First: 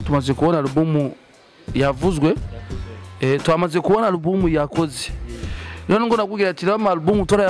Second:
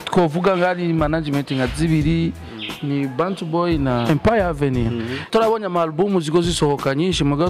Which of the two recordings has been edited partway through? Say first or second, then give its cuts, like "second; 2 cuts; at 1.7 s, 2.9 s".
second; 2 cuts; at 4.1 s, 5.3 s